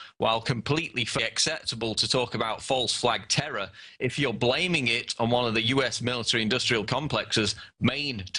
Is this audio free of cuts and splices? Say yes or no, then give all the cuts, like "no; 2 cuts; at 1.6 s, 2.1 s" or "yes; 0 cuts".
yes; 0 cuts